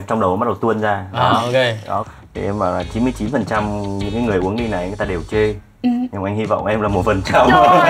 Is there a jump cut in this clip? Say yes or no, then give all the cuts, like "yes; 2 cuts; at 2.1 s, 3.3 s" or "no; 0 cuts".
yes; 1 cut; at 2.0 s